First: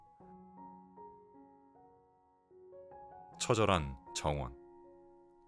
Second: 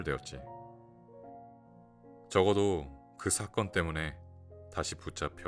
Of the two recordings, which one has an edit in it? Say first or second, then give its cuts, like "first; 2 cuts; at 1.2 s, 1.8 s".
first; 2 cuts; at 3.5 s, 4.5 s